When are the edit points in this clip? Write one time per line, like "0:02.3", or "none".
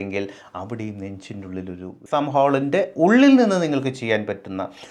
0:02.0